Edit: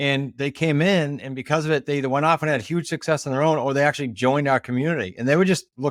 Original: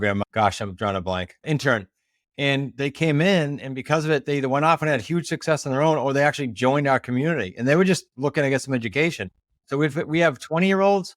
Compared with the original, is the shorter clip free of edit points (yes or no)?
yes